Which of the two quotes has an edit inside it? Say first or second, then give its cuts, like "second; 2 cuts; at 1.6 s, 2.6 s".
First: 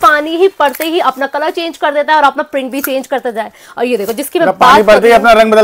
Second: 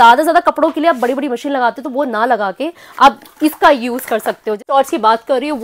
second; 1 cut; at 4.7 s